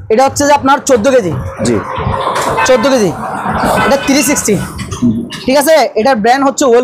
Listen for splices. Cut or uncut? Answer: uncut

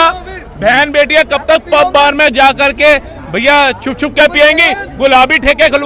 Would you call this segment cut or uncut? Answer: uncut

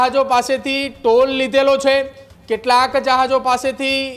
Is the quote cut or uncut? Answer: uncut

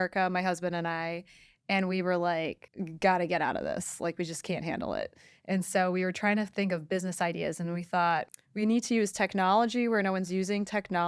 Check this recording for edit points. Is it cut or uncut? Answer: uncut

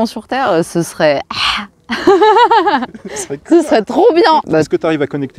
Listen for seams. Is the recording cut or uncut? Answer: cut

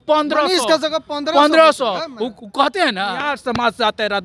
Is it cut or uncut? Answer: cut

